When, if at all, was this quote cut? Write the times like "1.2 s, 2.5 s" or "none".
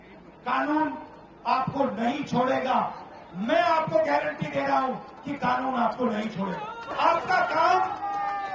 6.9 s